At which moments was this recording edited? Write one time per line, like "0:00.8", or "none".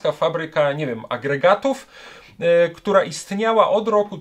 none